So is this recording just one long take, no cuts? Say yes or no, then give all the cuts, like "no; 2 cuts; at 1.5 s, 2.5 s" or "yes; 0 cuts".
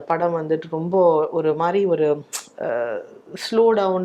yes; 0 cuts